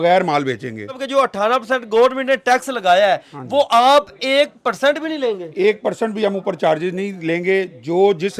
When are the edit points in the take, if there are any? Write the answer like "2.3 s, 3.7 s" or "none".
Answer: 1.0 s